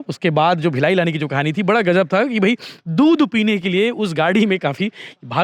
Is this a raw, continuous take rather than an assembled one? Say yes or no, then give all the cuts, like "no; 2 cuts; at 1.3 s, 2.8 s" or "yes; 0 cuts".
yes; 0 cuts